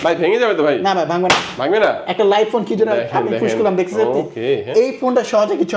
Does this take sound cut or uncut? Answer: uncut